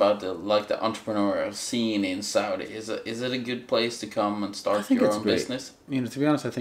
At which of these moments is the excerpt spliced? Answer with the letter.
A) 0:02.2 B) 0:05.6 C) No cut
C